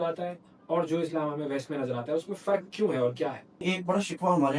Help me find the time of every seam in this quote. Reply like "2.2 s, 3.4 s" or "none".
3.6 s